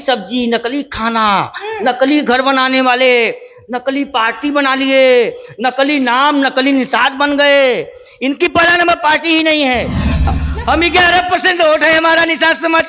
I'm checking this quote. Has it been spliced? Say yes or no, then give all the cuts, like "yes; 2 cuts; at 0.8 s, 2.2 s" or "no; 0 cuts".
yes; 1 cut; at 10.5 s